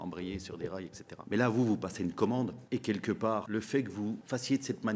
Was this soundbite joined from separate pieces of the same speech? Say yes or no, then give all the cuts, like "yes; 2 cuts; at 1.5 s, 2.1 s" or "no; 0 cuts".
yes; 3 cuts; at 1.1 s, 2.6 s, 3.6 s